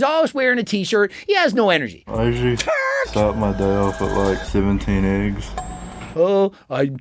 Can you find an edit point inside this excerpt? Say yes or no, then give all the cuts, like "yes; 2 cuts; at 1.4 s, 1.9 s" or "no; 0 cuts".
yes; 2 cuts; at 2.0 s, 6.0 s